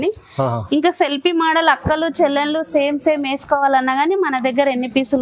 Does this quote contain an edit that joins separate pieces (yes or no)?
no